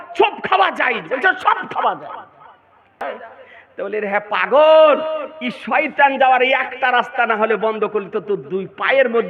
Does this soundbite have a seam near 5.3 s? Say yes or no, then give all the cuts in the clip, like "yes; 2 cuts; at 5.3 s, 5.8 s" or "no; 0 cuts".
no; 1 cut; at 3.2 s